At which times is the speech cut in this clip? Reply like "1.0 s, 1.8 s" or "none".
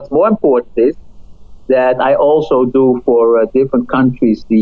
none